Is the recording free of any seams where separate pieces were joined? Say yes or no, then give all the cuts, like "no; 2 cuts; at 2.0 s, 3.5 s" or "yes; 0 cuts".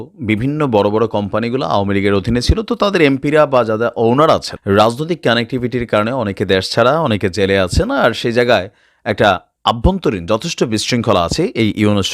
no; 1 cut; at 4.5 s